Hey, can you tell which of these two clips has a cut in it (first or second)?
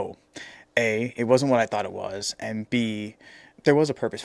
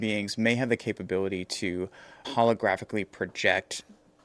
second